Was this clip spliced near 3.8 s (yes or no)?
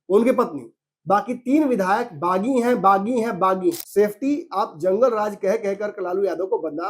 yes